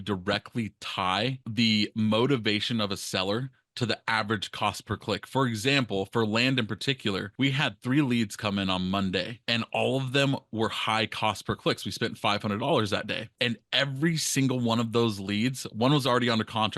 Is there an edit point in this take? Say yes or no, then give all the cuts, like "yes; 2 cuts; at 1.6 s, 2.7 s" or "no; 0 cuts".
no; 0 cuts